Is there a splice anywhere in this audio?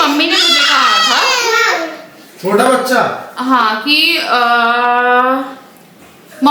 no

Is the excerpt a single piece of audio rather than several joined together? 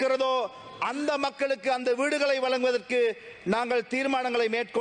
yes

